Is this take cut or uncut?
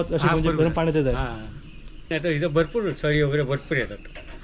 cut